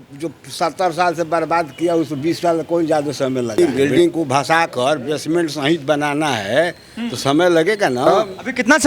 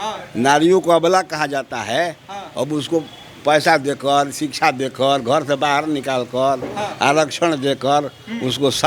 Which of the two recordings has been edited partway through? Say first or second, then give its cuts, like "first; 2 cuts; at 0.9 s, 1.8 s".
first; 2 cuts; at 3.6 s, 8.1 s